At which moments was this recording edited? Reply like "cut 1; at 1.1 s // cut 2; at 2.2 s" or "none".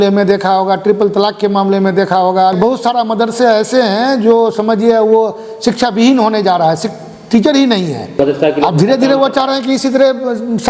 cut 1; at 2.5 s // cut 2; at 8.2 s